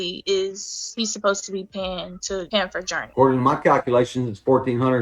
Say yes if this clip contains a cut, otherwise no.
yes